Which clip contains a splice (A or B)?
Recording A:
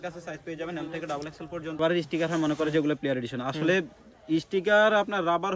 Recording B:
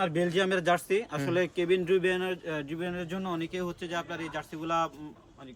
A